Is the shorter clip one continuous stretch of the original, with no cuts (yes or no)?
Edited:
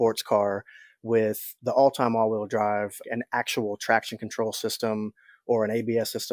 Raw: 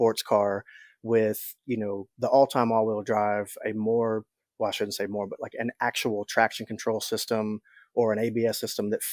no